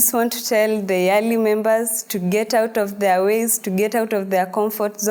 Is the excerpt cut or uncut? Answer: uncut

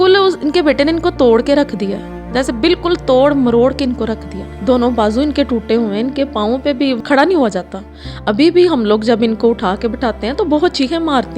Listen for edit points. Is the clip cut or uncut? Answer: cut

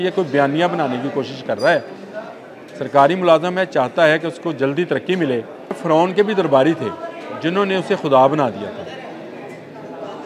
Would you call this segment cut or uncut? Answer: cut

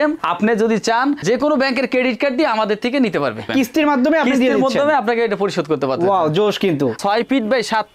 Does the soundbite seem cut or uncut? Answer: cut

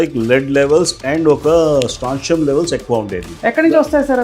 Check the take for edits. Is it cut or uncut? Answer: cut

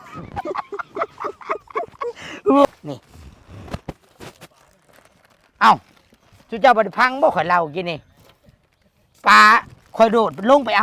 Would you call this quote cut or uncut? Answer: cut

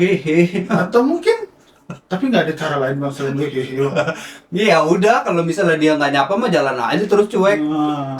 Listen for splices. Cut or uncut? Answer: uncut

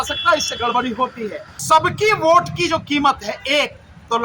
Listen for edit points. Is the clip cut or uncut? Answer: cut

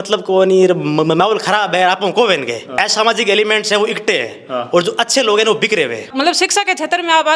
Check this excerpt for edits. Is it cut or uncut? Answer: cut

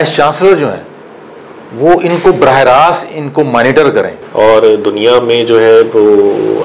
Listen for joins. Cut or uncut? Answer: cut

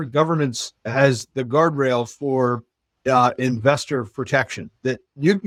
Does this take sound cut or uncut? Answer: uncut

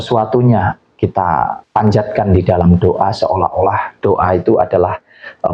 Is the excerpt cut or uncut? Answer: cut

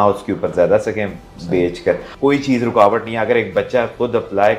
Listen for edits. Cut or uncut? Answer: cut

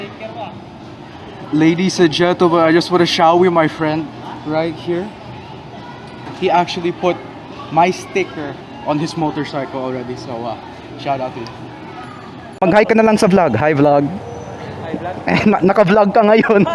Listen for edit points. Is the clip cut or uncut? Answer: uncut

